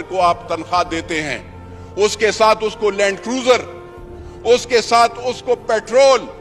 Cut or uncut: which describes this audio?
uncut